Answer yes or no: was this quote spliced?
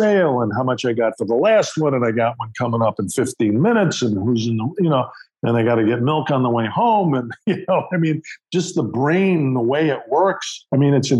no